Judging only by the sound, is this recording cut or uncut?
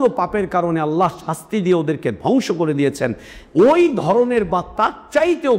uncut